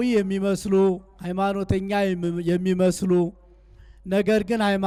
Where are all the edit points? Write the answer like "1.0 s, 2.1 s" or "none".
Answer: none